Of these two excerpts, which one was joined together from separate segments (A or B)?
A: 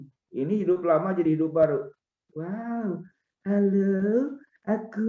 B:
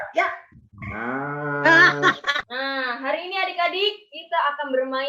B